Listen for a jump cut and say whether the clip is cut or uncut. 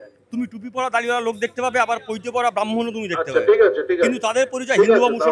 uncut